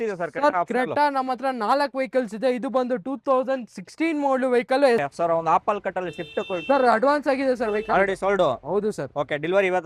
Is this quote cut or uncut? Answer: cut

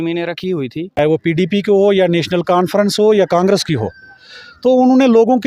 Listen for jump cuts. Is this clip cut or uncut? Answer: cut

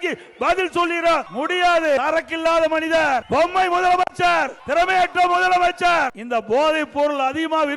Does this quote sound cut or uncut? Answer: cut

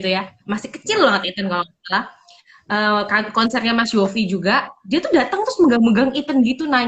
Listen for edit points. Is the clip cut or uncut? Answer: uncut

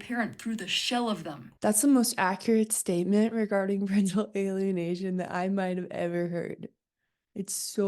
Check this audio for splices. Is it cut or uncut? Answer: cut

